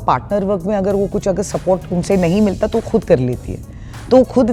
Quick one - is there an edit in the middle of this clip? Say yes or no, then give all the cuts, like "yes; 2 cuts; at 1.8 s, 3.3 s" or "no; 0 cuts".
no; 0 cuts